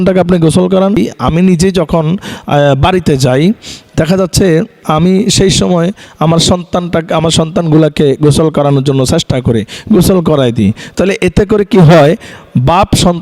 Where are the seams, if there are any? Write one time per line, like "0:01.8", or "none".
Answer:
0:01.0